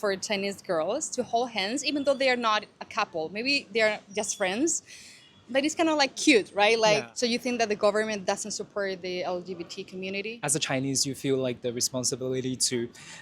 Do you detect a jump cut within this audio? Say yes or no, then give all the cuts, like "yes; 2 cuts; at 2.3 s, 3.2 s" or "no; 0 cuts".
yes; 2 cuts; at 7.1 s, 10.3 s